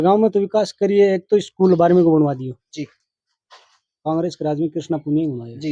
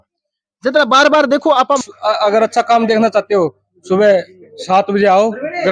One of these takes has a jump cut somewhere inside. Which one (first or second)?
second